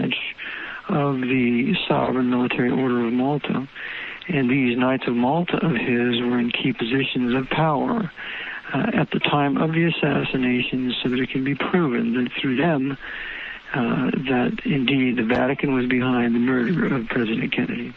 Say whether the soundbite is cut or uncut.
cut